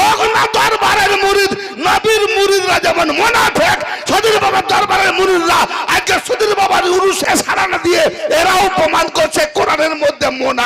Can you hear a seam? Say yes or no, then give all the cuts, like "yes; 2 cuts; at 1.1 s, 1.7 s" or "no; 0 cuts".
yes; 1 cut; at 7.2 s